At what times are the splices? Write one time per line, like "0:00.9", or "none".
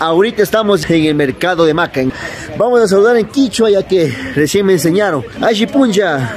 0:00.8
0:02.1
0:05.3

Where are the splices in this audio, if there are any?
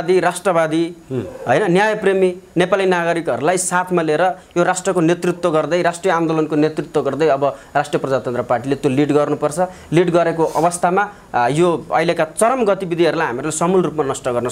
none

